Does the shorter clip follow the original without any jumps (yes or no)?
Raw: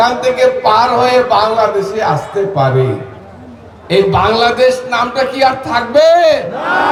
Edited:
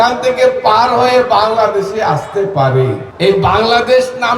no